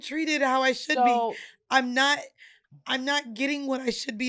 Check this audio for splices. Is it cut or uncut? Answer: uncut